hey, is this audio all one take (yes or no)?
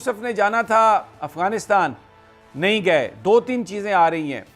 yes